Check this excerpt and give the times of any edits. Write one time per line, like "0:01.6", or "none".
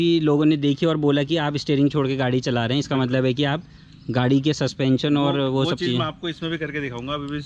none